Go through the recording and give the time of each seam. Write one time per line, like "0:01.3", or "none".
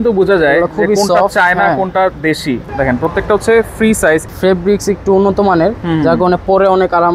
0:02.7
0:04.3